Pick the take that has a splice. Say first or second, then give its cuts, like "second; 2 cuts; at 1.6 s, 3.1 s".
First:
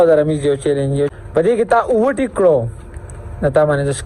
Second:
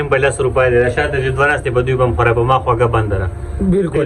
first; 1 cut; at 1.1 s